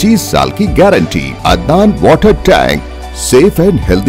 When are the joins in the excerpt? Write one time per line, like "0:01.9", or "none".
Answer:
0:01.3